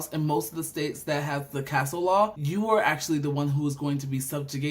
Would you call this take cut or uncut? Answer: cut